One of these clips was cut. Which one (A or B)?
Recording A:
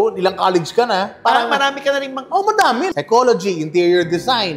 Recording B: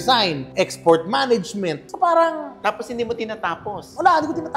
A